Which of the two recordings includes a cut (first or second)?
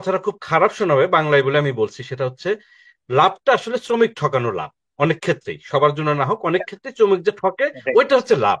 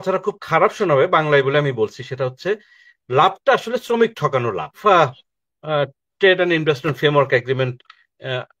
second